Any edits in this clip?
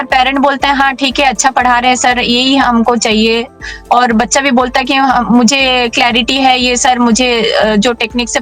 no; 0 cuts

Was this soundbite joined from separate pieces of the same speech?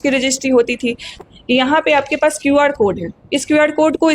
yes; 1 cut; at 1.2 s

